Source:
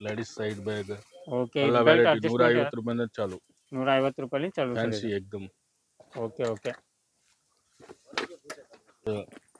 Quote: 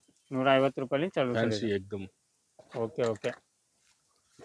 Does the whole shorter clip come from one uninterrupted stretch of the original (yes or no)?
yes